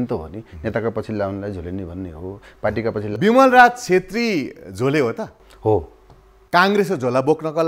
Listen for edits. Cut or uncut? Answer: cut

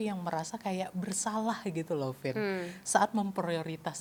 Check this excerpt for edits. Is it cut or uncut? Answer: uncut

